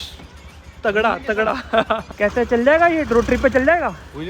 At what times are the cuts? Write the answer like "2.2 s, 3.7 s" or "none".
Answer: 2.1 s